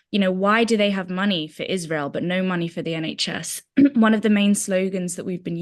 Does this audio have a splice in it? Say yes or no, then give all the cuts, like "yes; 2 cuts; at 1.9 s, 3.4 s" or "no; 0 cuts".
no; 0 cuts